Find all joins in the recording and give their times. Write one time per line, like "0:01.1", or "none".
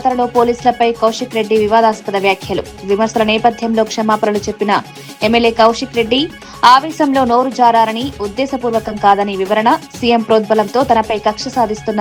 none